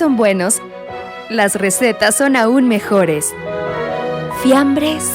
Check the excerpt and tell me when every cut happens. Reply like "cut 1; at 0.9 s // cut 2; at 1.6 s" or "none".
none

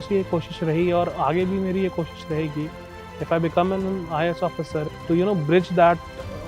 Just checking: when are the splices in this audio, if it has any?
cut 1; at 4.9 s

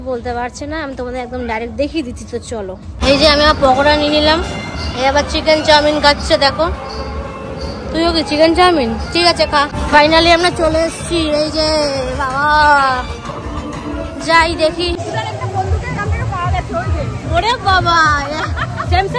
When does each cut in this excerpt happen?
cut 1; at 2.9 s // cut 2; at 9.8 s // cut 3; at 15.0 s

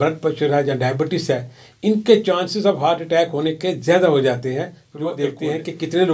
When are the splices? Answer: cut 1; at 5.2 s

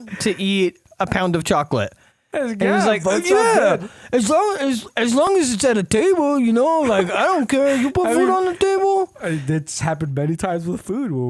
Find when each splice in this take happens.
none

